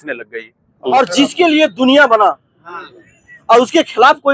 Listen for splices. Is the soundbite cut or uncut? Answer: cut